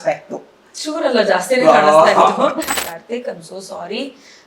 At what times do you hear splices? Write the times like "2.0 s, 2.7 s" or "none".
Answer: 2.8 s